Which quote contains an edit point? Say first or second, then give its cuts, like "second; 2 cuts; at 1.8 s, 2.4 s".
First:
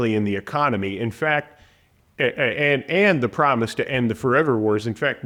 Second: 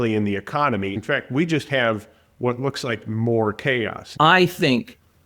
second; 2 cuts; at 1.0 s, 4.0 s